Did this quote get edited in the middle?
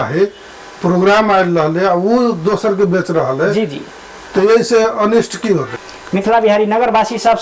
yes; 1 cut; at 5.8 s

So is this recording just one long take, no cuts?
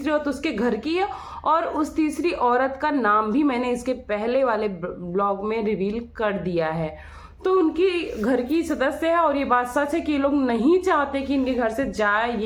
yes; 0 cuts

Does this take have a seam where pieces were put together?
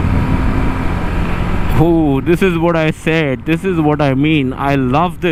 no; 0 cuts

